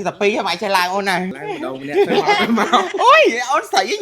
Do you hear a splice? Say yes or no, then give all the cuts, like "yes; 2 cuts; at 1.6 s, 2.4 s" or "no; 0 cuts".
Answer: yes; 1 cut; at 1.4 s